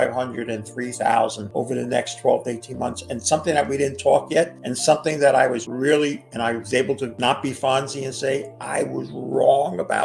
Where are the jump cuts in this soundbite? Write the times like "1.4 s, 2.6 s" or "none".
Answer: 1.4 s, 4.6 s, 5.7 s, 7.1 s, 8.6 s